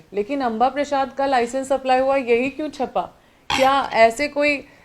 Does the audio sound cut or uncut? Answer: uncut